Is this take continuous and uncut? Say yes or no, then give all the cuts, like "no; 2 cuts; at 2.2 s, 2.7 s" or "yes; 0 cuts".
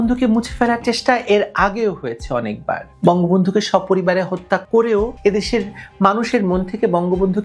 yes; 0 cuts